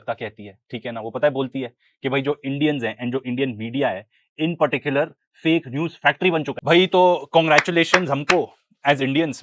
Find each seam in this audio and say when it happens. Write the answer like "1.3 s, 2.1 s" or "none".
none